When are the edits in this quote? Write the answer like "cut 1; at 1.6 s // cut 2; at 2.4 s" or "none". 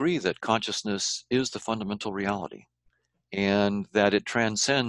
none